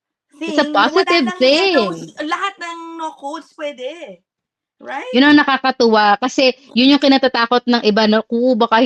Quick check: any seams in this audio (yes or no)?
no